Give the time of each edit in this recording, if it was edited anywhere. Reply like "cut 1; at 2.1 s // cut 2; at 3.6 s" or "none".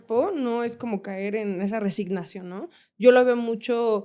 none